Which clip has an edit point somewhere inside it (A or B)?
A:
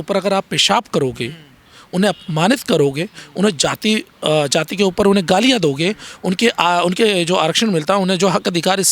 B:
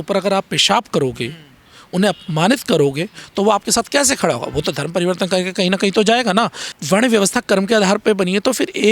B